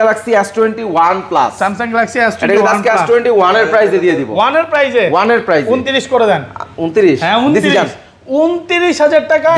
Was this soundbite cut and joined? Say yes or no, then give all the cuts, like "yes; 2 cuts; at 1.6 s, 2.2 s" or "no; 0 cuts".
no; 0 cuts